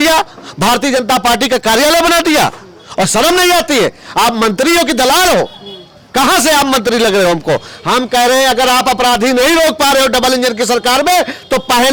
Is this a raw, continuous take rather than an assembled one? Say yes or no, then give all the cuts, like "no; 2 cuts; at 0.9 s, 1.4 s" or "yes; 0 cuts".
yes; 0 cuts